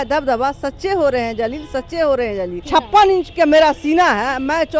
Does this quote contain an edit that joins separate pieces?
yes; 1 cut; at 2.6 s

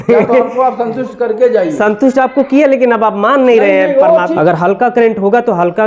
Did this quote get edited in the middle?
yes; 1 cut; at 4.3 s

